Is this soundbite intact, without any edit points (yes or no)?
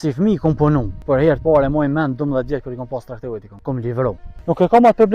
no